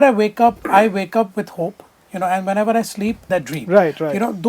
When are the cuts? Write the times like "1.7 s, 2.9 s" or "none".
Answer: 3.2 s